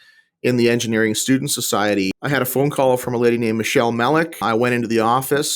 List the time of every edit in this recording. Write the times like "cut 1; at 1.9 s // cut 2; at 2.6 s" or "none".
cut 1; at 2.1 s